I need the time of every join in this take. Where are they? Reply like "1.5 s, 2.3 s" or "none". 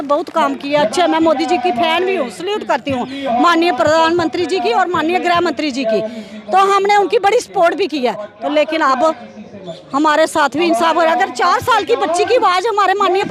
none